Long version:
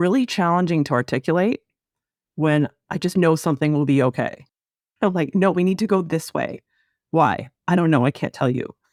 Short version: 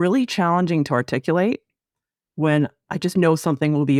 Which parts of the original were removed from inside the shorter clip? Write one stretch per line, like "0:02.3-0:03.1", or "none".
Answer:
none